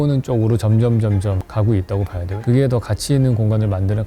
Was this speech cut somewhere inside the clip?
yes; 1 cut; at 2.3 s

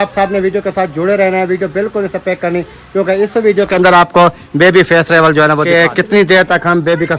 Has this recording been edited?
yes; 1 cut; at 5.7 s

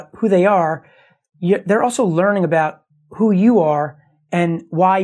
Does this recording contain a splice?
no; 0 cuts

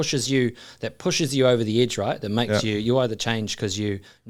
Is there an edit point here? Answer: no; 0 cuts

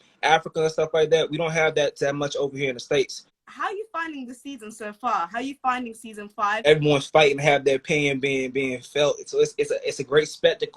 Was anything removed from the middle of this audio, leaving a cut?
yes; 2 cuts; at 3.3 s, 6.6 s

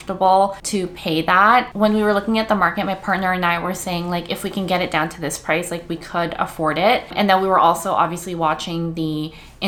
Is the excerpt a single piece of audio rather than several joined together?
yes; 0 cuts

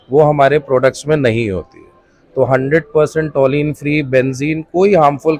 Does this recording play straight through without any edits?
yes; 0 cuts

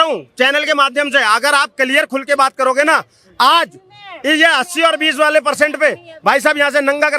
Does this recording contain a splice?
no; 0 cuts

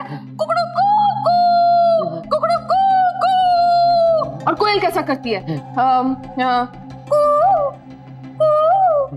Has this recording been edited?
yes; 1 cut; at 4.3 s

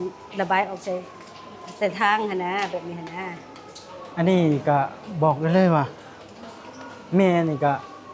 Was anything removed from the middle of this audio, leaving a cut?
no; 0 cuts

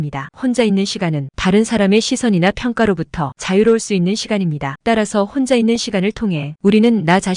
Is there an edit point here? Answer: yes; 2 cuts; at 4.8 s, 6.5 s

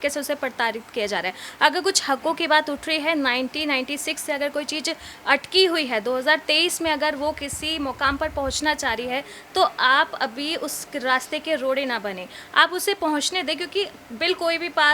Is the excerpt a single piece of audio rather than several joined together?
yes; 0 cuts

